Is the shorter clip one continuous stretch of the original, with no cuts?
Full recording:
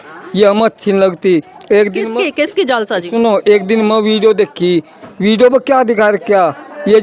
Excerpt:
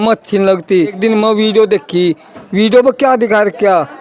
no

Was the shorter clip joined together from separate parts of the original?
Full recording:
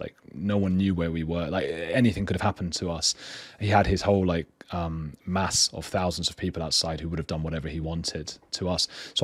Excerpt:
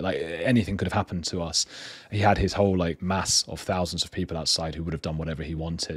yes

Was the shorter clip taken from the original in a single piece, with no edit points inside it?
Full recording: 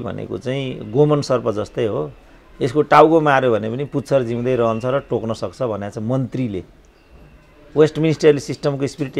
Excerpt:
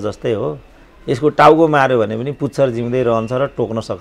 yes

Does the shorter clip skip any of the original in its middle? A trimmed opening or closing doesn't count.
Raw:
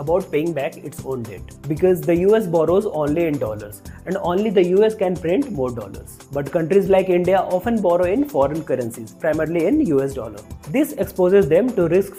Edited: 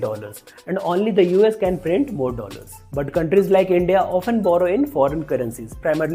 no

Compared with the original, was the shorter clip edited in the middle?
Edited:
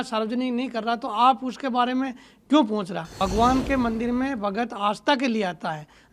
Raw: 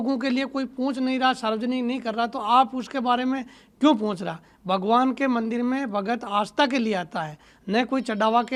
yes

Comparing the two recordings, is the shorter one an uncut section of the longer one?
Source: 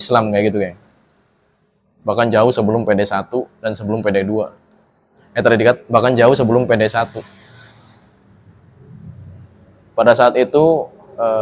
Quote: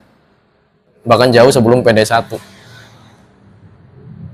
no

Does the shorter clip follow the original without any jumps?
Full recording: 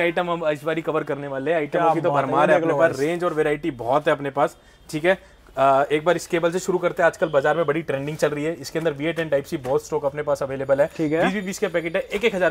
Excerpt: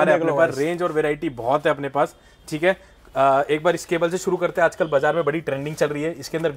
yes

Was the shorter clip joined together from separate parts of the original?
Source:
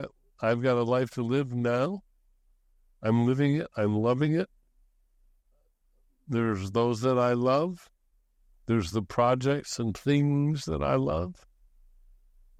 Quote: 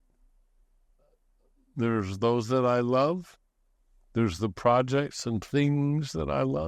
no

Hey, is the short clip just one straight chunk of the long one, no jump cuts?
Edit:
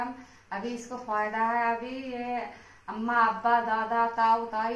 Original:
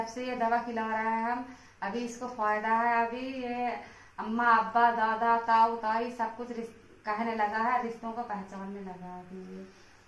yes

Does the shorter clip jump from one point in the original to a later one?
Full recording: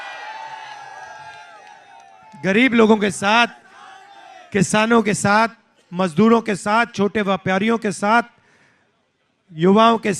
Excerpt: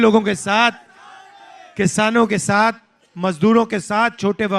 no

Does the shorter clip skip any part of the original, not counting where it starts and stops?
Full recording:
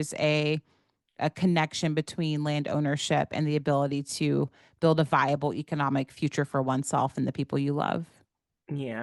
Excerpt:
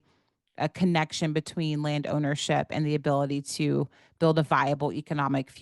no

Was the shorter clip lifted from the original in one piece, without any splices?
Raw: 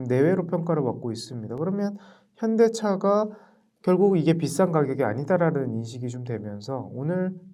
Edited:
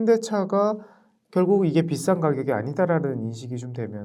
yes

